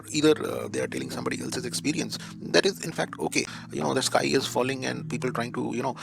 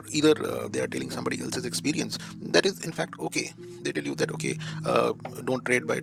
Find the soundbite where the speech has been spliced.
first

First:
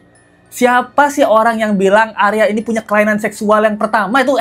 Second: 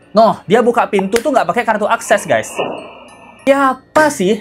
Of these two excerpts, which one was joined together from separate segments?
second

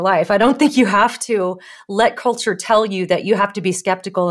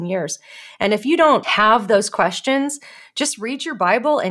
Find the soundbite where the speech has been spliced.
second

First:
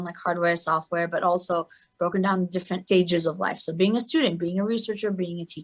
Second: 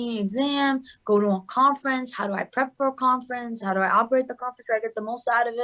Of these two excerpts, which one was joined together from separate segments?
first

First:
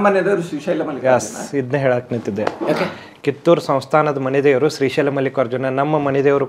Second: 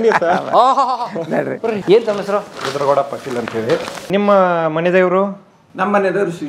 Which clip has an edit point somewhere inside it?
second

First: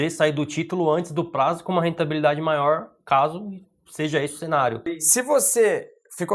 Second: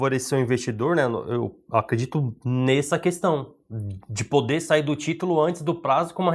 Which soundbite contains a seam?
first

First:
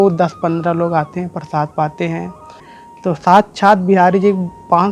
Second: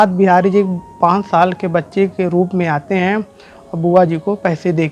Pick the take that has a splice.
first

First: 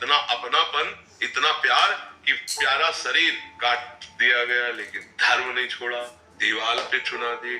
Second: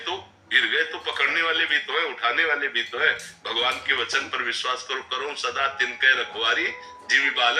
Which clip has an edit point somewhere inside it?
first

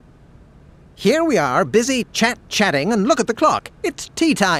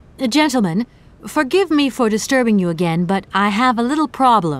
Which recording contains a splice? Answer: first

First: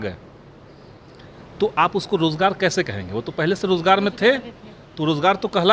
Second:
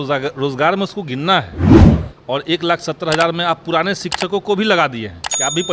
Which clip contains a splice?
second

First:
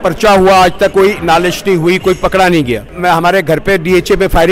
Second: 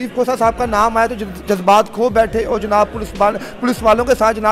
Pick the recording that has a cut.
first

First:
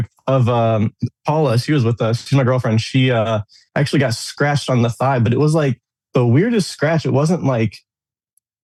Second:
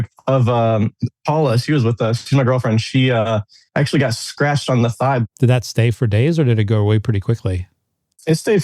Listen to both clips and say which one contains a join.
second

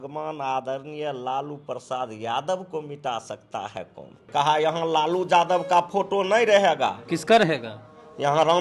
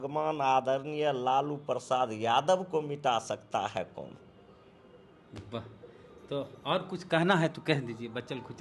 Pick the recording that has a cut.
first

